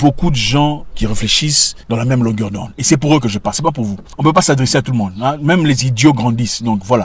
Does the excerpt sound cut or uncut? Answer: cut